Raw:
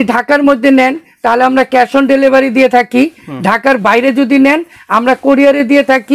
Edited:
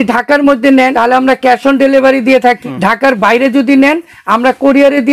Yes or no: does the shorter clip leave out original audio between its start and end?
yes